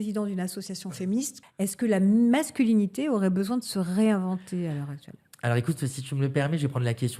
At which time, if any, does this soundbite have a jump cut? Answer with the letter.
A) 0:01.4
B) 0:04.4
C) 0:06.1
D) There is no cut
A